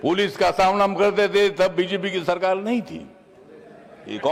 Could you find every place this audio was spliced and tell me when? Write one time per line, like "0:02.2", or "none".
none

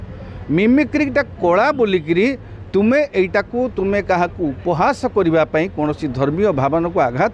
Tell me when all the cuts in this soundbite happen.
none

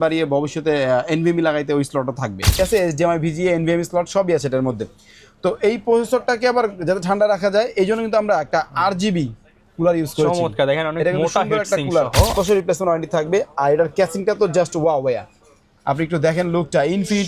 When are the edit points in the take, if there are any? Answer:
0:02.6
0:12.3

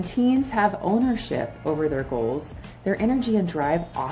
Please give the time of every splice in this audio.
none

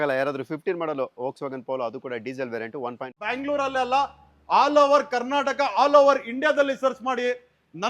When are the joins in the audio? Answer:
0:03.2

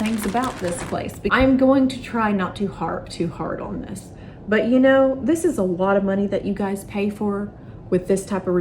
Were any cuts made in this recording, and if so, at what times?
0:01.3

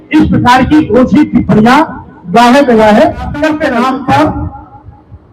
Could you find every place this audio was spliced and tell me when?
0:03.6

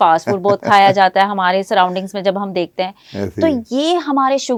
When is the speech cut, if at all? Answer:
none

